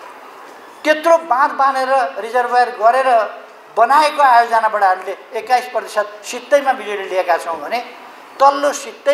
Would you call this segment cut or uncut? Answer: uncut